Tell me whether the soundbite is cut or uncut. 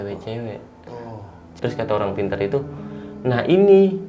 cut